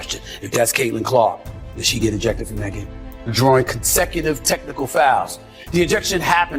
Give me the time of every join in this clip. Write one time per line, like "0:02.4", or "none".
0:03.0